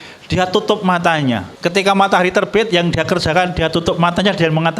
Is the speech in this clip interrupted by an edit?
yes; 1 cut; at 1.5 s

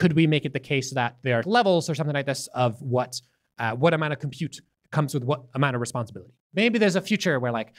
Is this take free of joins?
no; 2 cuts; at 1.4 s, 6.5 s

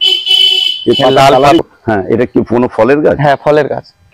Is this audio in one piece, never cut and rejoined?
no; 1 cut; at 1.6 s

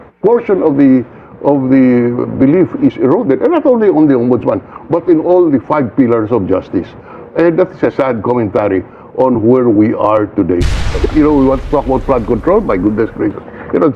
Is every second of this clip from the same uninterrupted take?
no; 1 cut; at 10.8 s

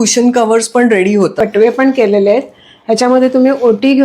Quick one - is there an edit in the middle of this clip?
yes; 1 cut; at 1.4 s

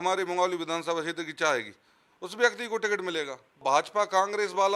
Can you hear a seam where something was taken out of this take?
yes; 1 cut; at 3.6 s

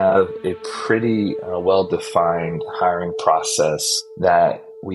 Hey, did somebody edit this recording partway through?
no; 0 cuts

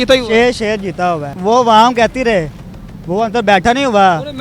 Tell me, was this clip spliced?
no; 0 cuts

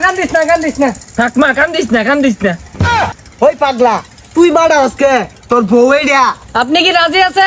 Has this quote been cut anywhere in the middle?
yes; 3 cuts; at 1.0 s, 3.2 s, 6.4 s

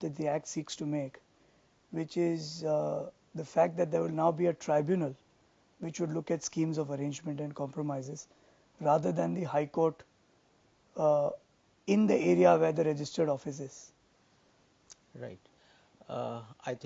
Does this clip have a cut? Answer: yes; 1 cut; at 14.5 s

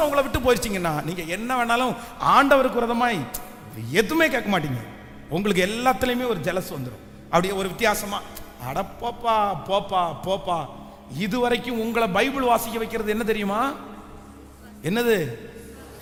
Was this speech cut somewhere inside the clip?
no; 0 cuts

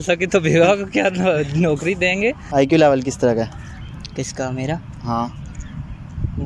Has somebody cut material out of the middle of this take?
yes; 1 cut; at 2.4 s

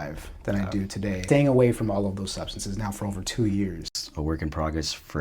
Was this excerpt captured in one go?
no; 2 cuts; at 1.2 s, 3.8 s

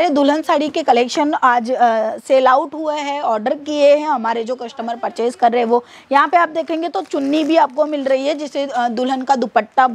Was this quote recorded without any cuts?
yes; 0 cuts

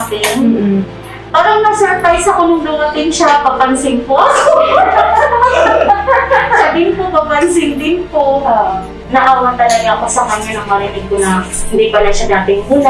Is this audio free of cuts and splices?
no; 1 cut; at 9.0 s

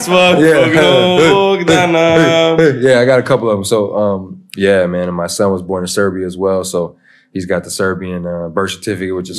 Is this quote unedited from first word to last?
no; 1 cut; at 4.5 s

